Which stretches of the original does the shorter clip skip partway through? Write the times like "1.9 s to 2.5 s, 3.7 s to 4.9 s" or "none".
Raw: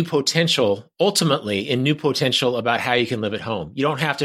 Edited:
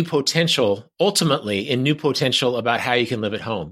none